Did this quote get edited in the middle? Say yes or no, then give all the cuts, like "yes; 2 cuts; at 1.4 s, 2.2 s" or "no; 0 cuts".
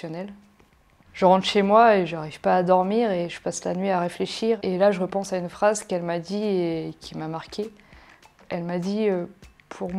yes; 1 cut; at 1.0 s